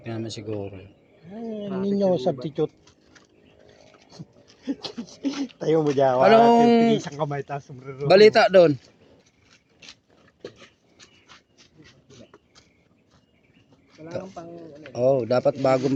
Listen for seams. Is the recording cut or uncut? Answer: uncut